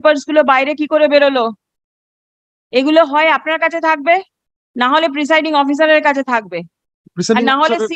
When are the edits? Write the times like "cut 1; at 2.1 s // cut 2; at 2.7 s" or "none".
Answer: none